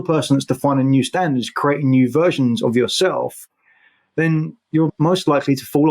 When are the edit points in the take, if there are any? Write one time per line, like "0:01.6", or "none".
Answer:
0:04.9